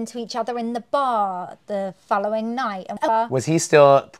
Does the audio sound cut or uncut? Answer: cut